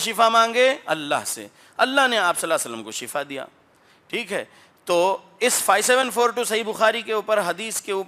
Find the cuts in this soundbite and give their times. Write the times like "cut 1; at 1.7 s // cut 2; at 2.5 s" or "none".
none